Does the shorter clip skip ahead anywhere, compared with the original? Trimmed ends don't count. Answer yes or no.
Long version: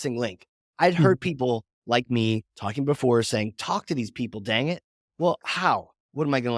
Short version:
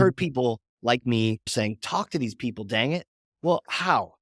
yes